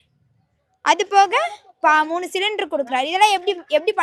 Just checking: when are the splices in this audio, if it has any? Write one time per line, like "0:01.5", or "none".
none

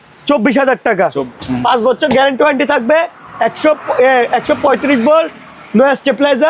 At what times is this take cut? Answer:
0:01.3

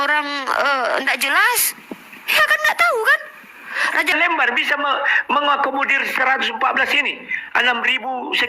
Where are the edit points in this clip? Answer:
0:04.1

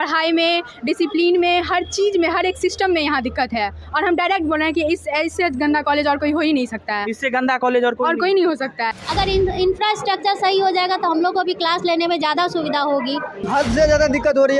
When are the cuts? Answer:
0:08.9
0:13.4

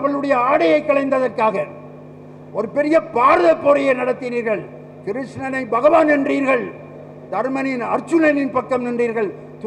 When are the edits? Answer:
none

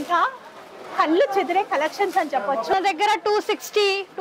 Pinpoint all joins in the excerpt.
0:02.7

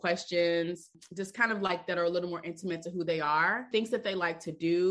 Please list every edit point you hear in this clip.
0:01.0
0:03.6

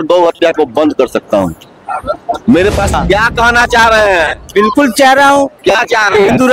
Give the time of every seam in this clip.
0:02.9

